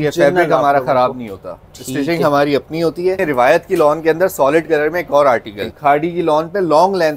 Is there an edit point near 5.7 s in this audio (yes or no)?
yes